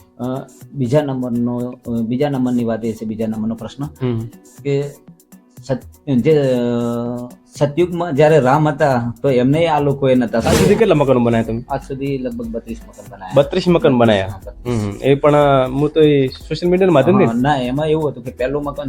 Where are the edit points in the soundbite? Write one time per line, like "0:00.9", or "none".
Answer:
0:10.5